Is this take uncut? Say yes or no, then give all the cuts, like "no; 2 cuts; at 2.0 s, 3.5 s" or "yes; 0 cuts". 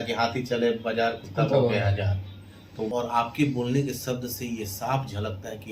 no; 1 cut; at 2.9 s